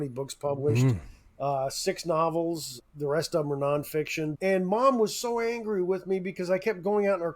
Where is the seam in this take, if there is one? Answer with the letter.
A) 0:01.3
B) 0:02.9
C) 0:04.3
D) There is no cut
C